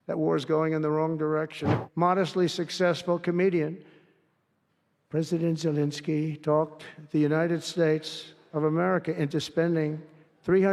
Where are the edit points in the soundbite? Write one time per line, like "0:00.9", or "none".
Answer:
0:01.6